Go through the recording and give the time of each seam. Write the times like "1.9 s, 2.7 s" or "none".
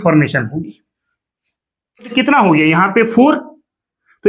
2.1 s